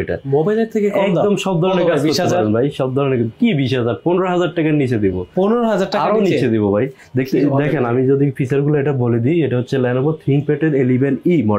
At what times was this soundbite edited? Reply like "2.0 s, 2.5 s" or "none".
none